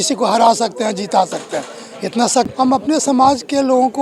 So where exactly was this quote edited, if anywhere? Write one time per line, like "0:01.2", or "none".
0:02.5